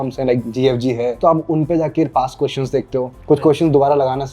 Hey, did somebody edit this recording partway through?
no; 0 cuts

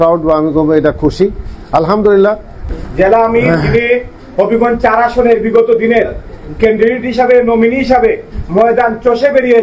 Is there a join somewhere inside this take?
yes; 1 cut; at 2.6 s

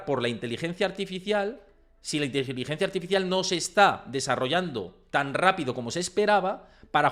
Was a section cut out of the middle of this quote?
no; 0 cuts

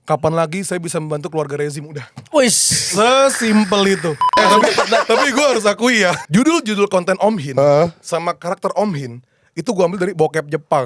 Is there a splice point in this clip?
yes; 2 cuts; at 4.3 s, 6.2 s

